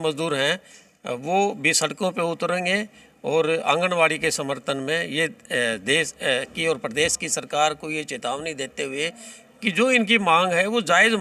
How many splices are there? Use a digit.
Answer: 0